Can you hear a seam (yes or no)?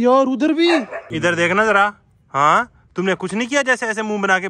yes